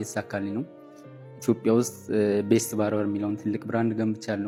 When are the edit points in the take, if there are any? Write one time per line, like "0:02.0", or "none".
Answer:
none